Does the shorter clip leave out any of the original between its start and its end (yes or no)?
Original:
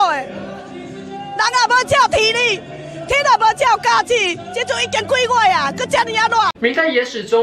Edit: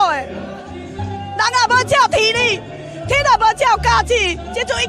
no